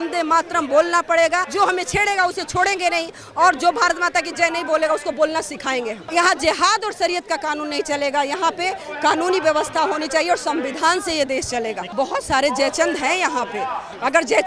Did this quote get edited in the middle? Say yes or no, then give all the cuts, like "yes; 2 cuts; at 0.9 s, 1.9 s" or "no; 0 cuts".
yes; 3 cuts; at 1.5 s, 6.0 s, 11.8 s